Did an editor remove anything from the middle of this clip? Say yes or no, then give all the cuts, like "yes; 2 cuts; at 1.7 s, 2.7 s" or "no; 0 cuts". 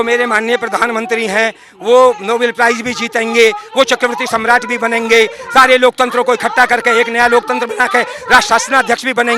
no; 0 cuts